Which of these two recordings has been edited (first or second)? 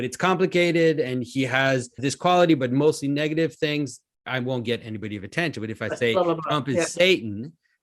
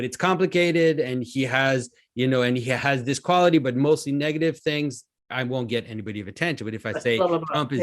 first